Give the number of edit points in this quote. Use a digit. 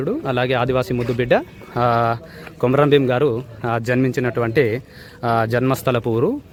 0